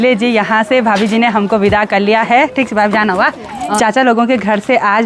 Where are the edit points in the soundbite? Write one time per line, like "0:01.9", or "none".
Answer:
0:03.8